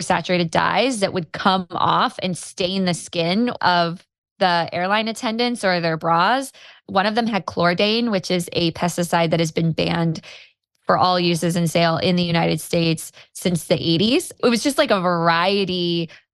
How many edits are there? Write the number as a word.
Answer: three